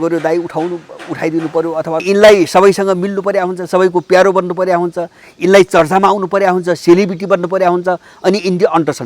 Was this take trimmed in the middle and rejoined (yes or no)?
yes